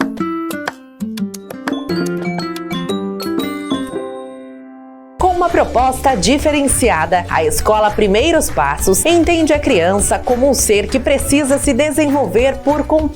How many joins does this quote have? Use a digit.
1